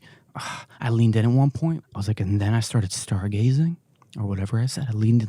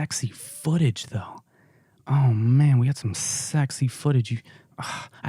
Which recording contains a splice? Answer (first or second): first